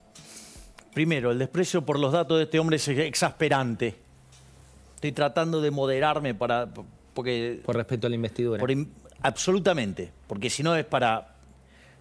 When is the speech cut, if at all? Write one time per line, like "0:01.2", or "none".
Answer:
none